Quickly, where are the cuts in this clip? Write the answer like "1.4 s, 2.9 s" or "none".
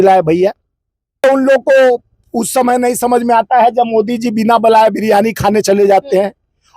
1.2 s

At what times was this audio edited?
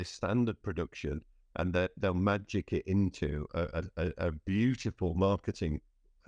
none

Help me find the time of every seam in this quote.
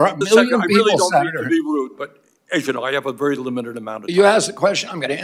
none

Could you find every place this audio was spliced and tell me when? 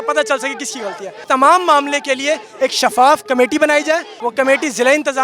1.1 s, 4.2 s

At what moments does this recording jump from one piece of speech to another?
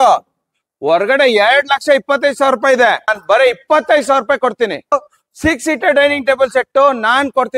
3.2 s, 5.1 s

